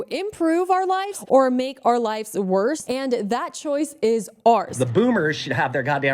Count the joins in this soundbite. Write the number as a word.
three